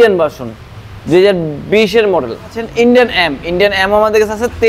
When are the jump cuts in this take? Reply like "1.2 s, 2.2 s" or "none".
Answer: 2.6 s